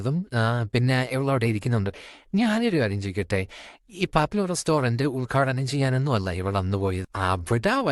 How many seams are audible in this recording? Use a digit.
0